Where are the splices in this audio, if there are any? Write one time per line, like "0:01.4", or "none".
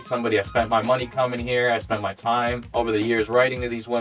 0:02.6